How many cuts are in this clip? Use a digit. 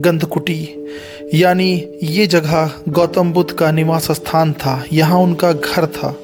0